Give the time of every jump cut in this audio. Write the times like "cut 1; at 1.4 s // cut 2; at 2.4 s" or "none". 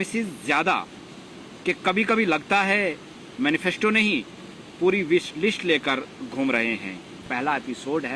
cut 1; at 7.2 s